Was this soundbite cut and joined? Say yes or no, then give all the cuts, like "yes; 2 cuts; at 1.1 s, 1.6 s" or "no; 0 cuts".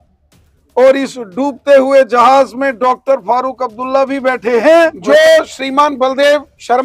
yes; 1 cut; at 5.0 s